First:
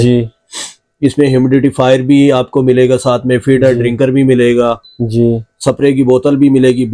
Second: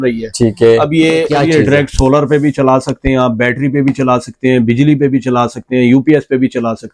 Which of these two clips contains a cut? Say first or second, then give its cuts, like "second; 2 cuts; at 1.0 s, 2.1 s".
second; 1 cut; at 1.3 s